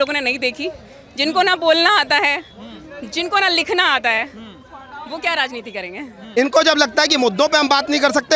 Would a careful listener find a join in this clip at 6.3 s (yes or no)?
yes